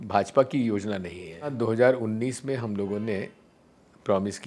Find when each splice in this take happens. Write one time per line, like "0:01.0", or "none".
0:01.5